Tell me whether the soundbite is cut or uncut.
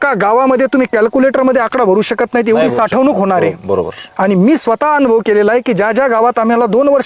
uncut